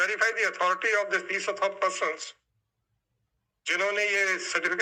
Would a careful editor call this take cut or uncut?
uncut